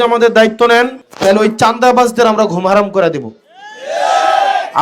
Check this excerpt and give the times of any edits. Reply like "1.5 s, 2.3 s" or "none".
1.0 s